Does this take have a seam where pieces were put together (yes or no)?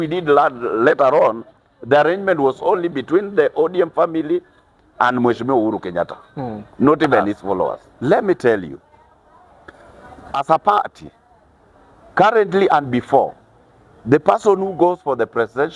yes